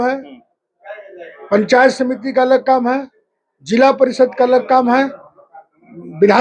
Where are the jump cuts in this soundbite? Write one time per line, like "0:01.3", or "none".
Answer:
none